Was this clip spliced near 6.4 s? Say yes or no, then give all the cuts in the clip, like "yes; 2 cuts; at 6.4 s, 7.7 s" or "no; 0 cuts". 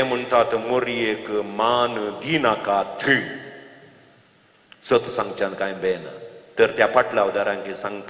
no; 1 cut; at 4.2 s